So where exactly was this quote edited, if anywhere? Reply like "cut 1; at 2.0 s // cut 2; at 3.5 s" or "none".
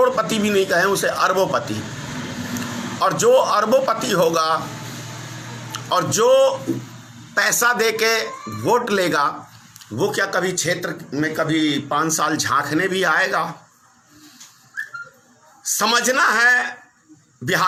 none